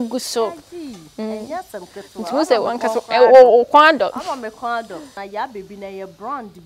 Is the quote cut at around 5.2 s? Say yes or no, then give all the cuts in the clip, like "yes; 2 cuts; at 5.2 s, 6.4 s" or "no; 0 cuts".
yes; 1 cut; at 5.2 s